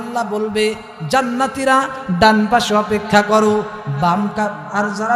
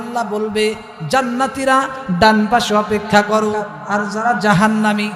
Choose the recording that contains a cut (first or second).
second